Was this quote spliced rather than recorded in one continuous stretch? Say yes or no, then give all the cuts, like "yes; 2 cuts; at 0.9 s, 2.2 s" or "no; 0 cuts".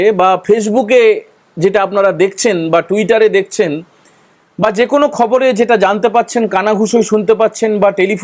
no; 0 cuts